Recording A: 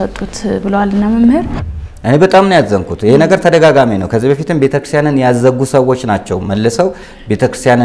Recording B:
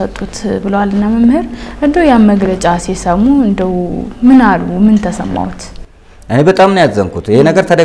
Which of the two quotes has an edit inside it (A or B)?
A